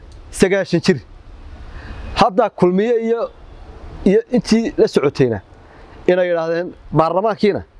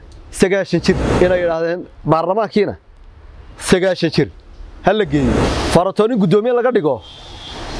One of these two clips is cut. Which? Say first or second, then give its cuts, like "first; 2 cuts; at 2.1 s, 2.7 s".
second; 2 cuts; at 1.1 s, 5.5 s